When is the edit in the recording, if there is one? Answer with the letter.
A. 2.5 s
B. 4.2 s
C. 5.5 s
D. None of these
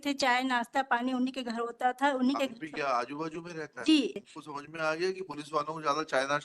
B